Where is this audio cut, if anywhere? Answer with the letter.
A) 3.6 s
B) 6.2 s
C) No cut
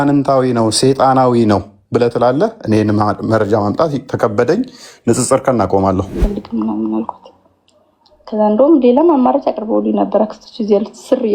B